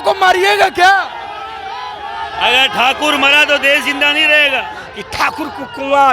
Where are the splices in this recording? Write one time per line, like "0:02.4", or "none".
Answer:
0:04.8